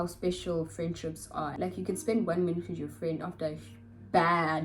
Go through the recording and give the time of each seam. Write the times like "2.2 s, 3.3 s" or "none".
1.6 s